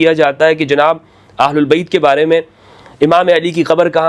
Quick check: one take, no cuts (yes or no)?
yes